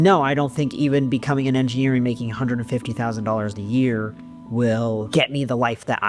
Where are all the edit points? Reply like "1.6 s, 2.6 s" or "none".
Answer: 5.1 s